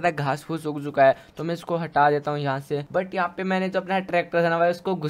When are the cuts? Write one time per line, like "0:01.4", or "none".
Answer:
0:02.8